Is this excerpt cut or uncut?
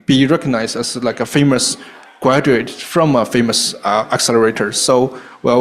uncut